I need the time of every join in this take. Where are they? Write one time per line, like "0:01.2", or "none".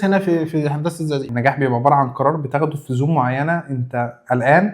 0:01.3